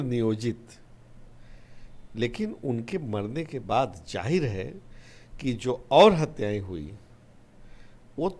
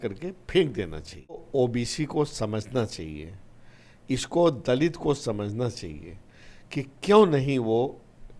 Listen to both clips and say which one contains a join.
second; 1 cut; at 1.4 s

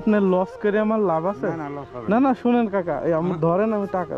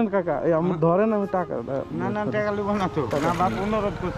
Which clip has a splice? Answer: second; 1 cut; at 3.1 s

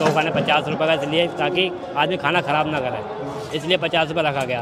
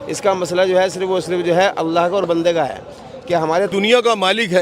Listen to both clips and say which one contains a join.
second; 1 cut; at 3.7 s

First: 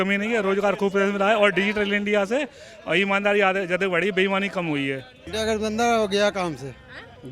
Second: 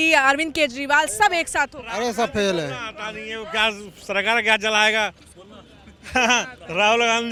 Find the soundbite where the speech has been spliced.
first; 1 cut; at 5.2 s

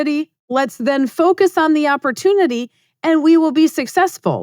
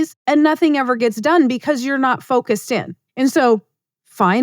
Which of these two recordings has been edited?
second; 1 cut; at 3.0 s

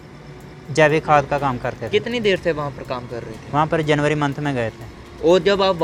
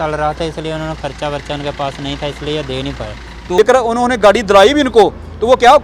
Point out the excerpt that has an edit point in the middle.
second; 1 cut; at 3.4 s

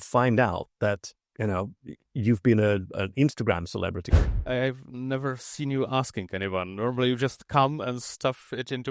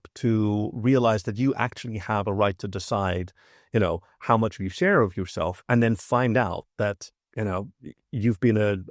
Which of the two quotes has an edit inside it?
first; 1 cut; at 4.4 s

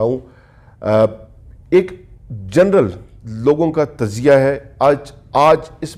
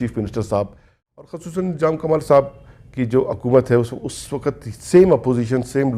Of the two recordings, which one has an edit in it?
second; 1 cut; at 1.0 s

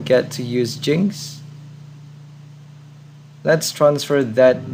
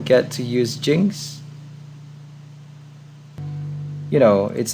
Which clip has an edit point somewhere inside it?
second; 1 cut; at 3.3 s

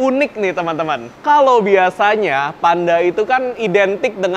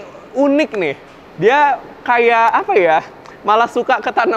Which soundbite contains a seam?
first; 1 cut; at 1.1 s

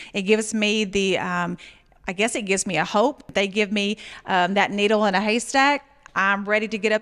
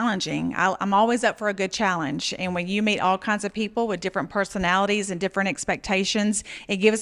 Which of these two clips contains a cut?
first; 1 cut; at 3.3 s

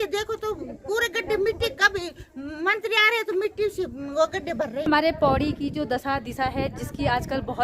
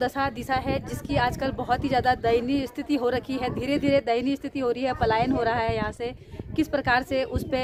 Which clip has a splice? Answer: first; 1 cut; at 4.8 s

